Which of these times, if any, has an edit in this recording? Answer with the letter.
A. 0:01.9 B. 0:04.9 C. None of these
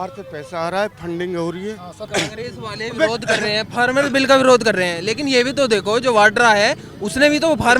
A